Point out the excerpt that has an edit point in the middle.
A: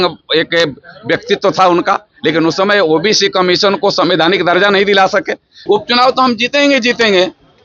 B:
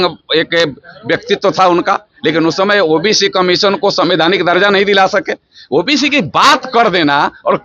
A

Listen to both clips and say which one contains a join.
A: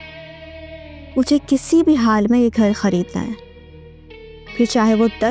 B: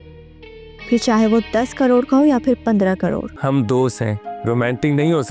B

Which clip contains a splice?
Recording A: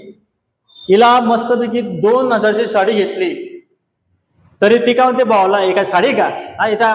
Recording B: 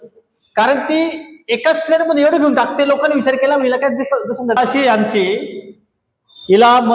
B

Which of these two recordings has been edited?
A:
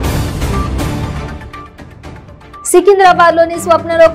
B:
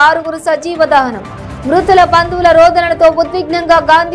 A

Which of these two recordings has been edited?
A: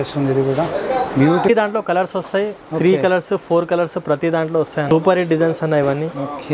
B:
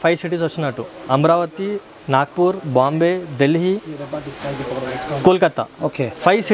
A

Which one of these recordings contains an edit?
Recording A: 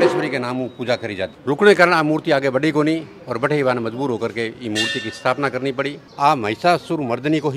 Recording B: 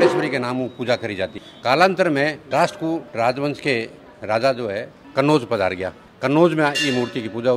A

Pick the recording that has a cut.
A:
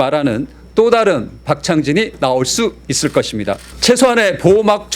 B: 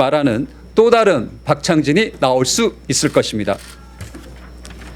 A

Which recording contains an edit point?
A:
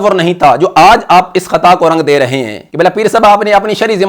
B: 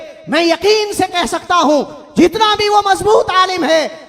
A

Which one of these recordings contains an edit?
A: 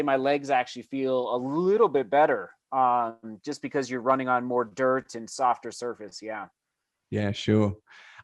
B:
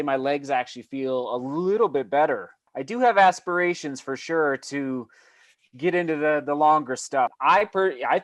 B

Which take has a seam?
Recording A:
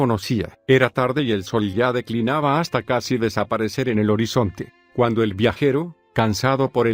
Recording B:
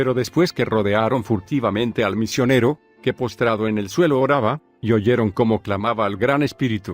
B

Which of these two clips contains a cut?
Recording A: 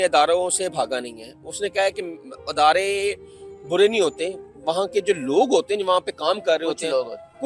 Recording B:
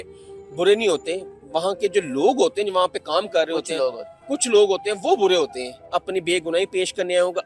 B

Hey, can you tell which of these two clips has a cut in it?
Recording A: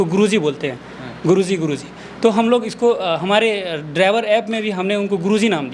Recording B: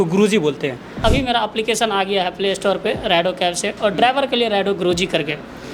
B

